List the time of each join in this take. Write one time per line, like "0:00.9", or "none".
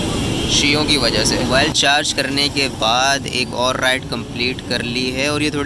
0:01.5

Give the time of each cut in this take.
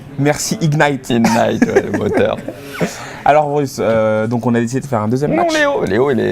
0:04.2

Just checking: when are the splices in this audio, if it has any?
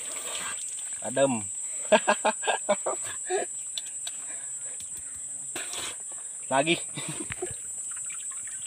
none

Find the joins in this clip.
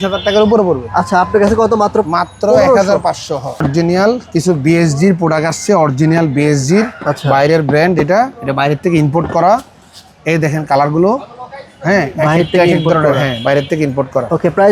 none

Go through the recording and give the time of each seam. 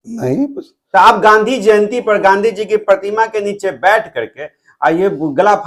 none

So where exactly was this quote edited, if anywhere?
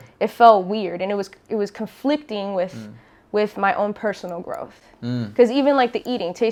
none

